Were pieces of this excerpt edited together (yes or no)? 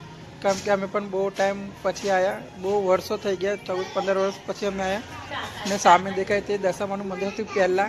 no